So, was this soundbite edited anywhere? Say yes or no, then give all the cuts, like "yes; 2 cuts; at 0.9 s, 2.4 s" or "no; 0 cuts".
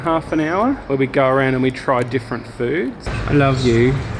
no; 0 cuts